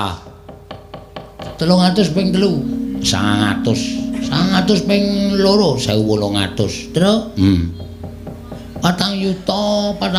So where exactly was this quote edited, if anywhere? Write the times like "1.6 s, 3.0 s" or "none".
1.5 s